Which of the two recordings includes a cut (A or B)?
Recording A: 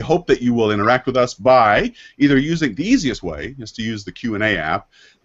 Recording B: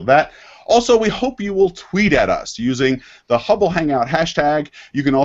B